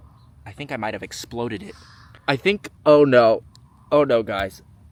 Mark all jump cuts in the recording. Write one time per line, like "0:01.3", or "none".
none